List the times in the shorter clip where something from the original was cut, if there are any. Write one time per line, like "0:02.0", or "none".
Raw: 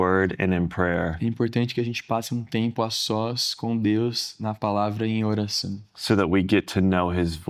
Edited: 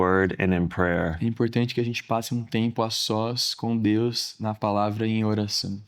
none